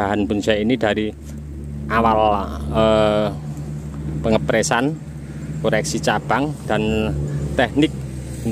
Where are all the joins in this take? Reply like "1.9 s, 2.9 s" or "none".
none